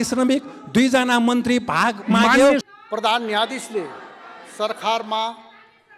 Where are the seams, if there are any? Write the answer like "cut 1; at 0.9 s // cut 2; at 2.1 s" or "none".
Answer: cut 1; at 2.6 s

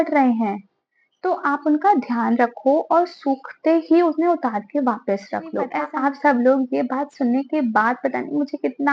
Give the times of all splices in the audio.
cut 1; at 5.8 s

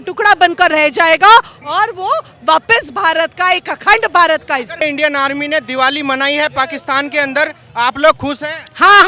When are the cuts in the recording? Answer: cut 1; at 4.7 s

